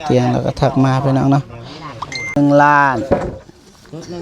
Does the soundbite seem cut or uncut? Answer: cut